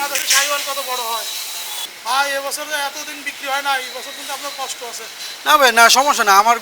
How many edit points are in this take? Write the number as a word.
one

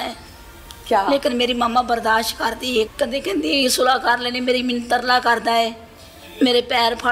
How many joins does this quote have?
zero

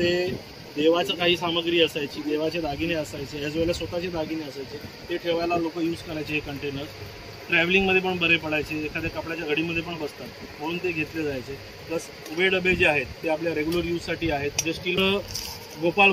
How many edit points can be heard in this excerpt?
one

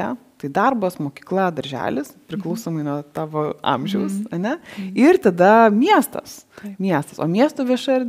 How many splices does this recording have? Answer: zero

